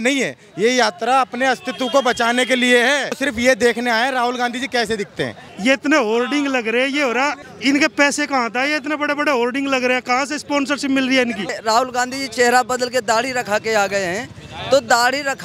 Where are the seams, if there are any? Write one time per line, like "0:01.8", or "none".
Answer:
0:03.2
0:05.4
0:07.4
0:11.6